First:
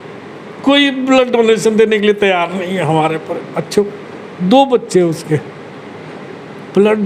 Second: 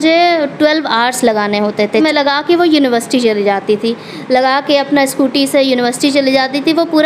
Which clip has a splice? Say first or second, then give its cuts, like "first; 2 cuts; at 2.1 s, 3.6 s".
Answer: second; 1 cut; at 2.0 s